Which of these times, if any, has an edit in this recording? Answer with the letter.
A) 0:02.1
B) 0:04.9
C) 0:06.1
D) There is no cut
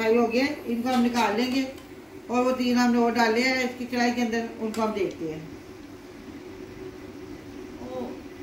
D